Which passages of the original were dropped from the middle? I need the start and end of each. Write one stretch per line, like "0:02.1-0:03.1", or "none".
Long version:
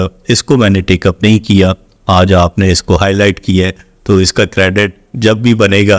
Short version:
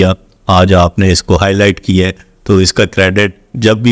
none